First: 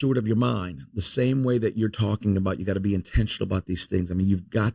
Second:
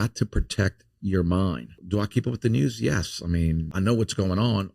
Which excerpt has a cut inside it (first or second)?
second